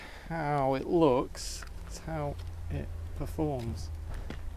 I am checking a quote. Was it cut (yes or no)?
no